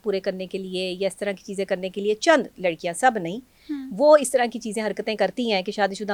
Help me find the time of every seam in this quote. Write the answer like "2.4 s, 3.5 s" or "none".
none